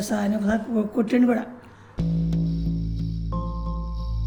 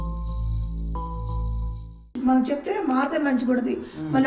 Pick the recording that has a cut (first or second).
second